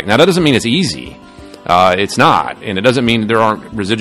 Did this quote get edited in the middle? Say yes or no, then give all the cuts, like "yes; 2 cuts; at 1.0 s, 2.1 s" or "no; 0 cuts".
no; 0 cuts